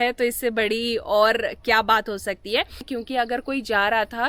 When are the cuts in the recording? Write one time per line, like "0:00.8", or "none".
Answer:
0:02.9